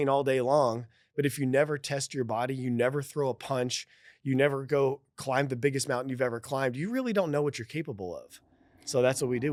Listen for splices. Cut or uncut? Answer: uncut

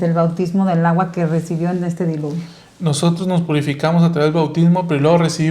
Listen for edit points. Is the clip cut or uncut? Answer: uncut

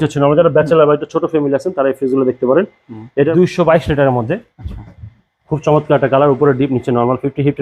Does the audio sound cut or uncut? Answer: cut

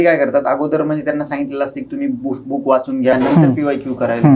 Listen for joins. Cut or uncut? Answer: cut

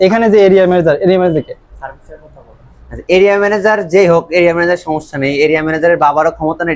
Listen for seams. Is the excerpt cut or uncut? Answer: uncut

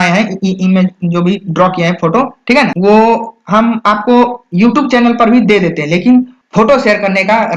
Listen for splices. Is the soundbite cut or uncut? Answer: cut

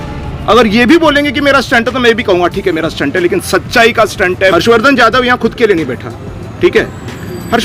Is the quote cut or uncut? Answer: cut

